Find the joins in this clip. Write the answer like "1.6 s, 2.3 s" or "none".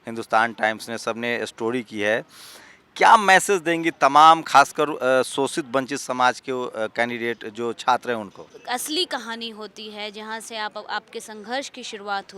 8.5 s